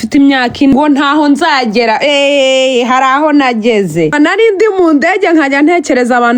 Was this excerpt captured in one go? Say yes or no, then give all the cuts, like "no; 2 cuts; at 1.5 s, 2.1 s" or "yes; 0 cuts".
no; 2 cuts; at 0.7 s, 4.1 s